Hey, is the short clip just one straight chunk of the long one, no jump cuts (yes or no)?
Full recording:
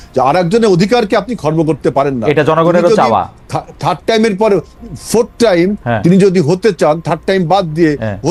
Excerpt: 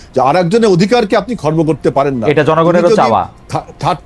yes